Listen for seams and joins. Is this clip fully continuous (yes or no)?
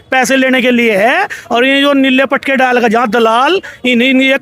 yes